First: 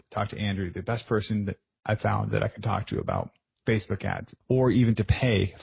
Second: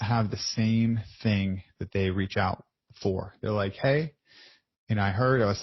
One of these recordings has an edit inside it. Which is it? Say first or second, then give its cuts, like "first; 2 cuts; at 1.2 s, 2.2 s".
first; 2 cuts; at 3.4 s, 4.3 s